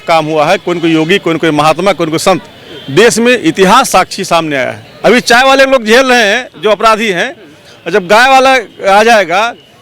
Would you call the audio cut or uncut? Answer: cut